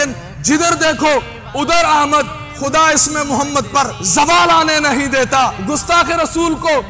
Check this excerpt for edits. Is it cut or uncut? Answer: cut